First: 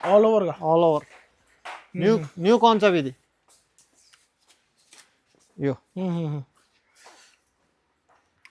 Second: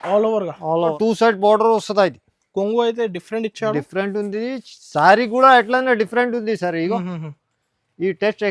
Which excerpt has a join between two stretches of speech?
second; 1 cut; at 1.0 s

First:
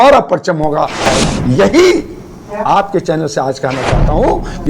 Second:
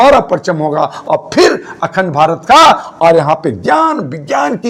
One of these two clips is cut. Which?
first; 1 cut; at 1.0 s

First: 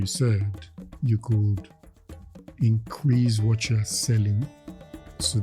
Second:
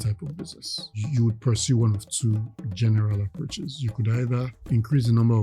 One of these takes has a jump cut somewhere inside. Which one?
second; 3 cuts; at 1.0 s, 2.6 s, 4.6 s

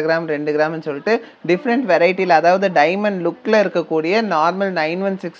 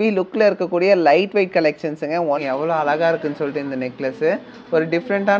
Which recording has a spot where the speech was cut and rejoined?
second; 1 cut; at 2.4 s

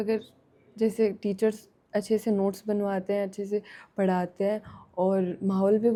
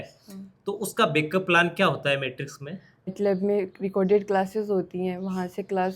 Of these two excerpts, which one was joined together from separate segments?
second; 1 cut; at 3.1 s

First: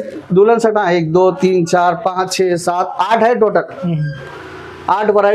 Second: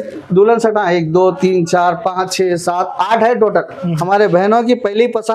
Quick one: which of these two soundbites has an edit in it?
second; 1 cut; at 4.0 s

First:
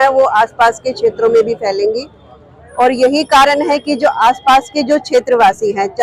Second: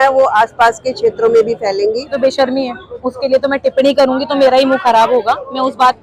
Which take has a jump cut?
second; 1 cut; at 2.1 s

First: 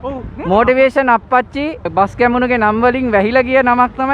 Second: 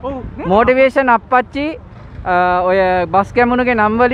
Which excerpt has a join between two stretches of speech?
first; 1 cut; at 1.9 s

